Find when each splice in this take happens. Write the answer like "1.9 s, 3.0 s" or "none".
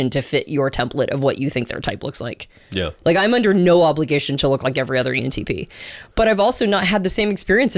none